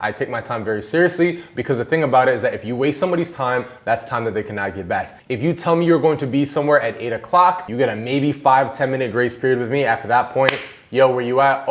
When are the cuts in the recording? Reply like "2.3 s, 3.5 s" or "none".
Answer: 5.2 s, 7.7 s